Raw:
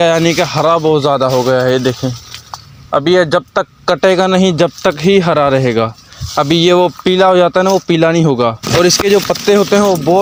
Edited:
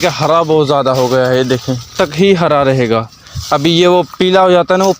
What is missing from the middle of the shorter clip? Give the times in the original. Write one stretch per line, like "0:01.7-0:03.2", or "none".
0:02.2-0:04.8